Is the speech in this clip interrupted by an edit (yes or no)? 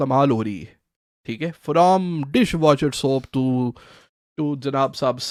no